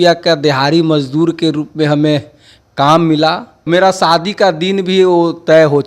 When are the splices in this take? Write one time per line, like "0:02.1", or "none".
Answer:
0:03.6